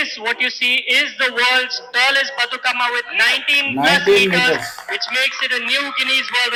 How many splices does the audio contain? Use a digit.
0